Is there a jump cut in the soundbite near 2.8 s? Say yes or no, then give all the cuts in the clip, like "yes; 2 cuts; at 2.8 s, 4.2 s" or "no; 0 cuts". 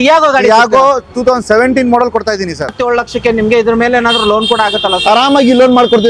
yes; 1 cut; at 2.8 s